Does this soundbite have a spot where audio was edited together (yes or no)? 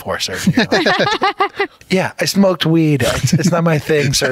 yes